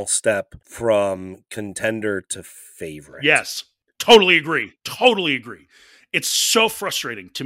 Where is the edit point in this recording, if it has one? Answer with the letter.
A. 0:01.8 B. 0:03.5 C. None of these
B